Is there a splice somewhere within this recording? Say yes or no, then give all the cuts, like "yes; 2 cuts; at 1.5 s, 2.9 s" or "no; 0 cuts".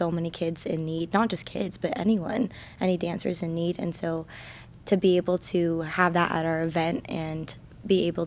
no; 0 cuts